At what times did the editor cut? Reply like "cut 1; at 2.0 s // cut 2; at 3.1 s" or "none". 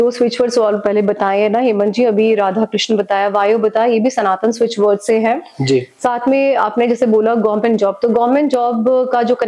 none